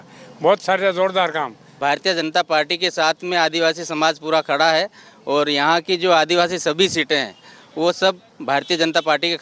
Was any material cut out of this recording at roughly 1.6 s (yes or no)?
yes